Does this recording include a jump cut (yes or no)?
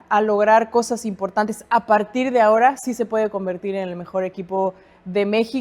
no